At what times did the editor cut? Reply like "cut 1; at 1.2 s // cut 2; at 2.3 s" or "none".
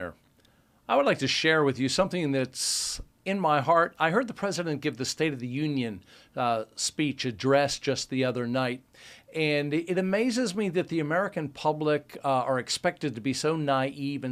none